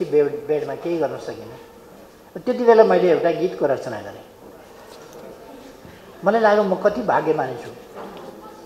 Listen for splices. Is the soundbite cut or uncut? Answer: uncut